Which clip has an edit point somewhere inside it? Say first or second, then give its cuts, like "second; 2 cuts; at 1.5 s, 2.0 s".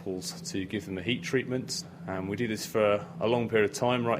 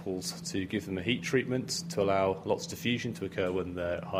first; 1 cut; at 1.8 s